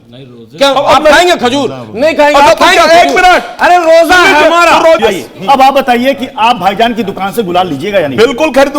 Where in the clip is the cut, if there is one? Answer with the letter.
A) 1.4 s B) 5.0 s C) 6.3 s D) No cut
B